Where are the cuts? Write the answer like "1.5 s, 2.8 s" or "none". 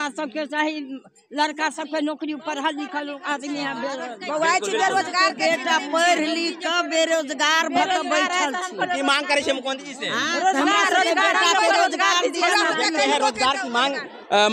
none